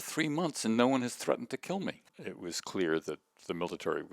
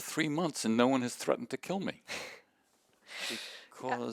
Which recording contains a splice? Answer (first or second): first